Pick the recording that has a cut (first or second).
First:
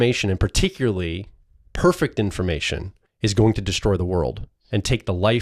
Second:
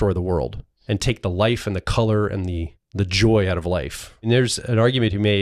second